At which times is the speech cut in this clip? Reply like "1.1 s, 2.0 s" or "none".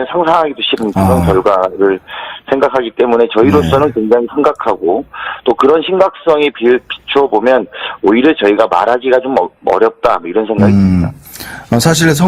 4.8 s